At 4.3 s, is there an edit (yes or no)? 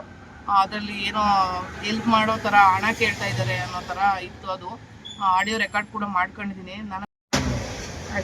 no